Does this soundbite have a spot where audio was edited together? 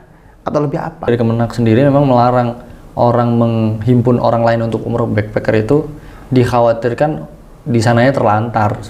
yes; 1 cut; at 1.1 s

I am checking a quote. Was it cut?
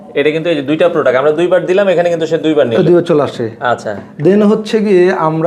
no; 0 cuts

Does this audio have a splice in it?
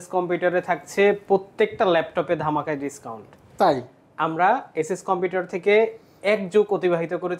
no; 0 cuts

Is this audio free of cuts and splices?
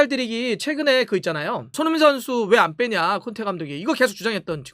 no; 1 cut; at 1.7 s

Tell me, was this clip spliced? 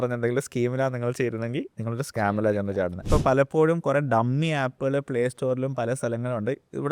yes; 1 cut; at 3.0 s

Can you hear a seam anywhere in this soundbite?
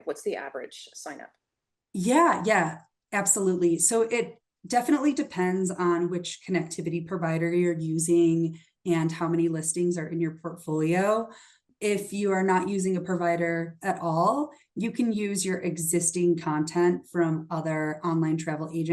no; 0 cuts

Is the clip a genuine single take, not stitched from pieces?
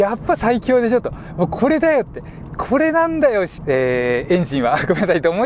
no; 1 cut; at 3.6 s

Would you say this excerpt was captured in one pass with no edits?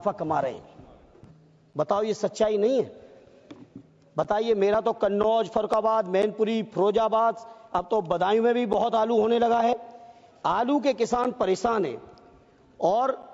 yes; 0 cuts

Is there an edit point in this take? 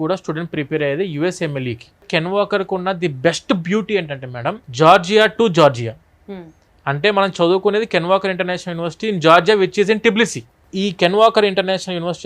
yes; 1 cut; at 2.1 s

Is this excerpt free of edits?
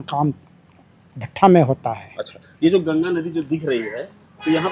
yes; 0 cuts

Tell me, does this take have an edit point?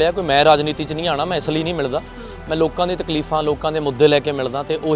no; 0 cuts

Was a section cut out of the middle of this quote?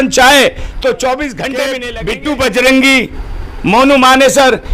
yes; 1 cut; at 1.9 s

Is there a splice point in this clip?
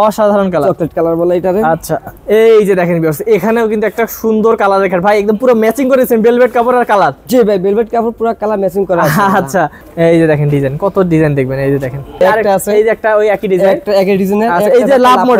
yes; 3 cuts; at 2.1 s, 9.8 s, 12.2 s

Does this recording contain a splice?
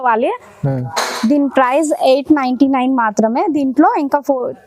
no; 0 cuts

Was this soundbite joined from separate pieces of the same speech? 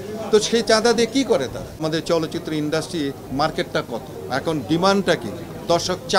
yes; 3 cuts; at 1.8 s, 3.3 s, 4.2 s

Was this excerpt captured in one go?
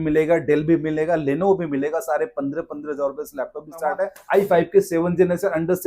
no; 1 cut; at 4.2 s

